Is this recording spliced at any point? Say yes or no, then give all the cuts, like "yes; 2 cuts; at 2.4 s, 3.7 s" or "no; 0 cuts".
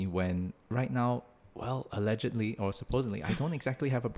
no; 0 cuts